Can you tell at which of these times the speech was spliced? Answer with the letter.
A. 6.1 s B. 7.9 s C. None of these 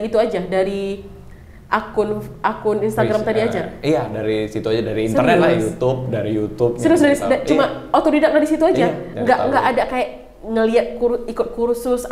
C